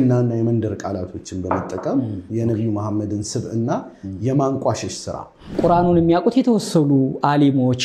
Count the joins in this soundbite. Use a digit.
2